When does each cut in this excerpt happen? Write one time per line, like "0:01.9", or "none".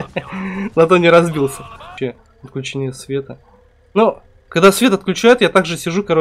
0:01.9